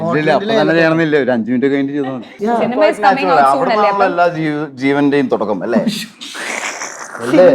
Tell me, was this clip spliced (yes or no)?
yes